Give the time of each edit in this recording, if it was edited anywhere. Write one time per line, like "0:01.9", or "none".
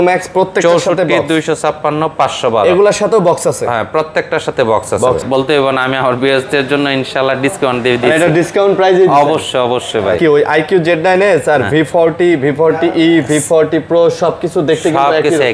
0:05.2
0:10.2